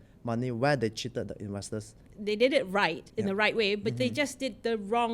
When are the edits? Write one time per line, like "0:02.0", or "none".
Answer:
0:02.0
0:03.0